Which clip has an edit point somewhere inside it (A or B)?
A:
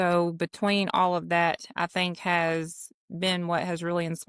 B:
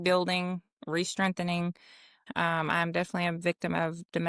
B